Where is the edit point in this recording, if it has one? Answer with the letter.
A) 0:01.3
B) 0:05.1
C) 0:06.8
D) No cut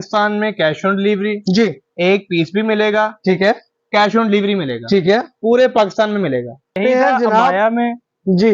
C